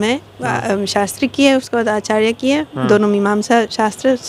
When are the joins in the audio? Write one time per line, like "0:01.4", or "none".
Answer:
none